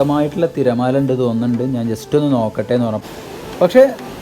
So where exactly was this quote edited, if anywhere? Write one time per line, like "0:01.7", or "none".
0:03.0